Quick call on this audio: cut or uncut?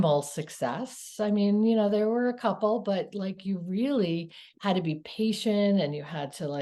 uncut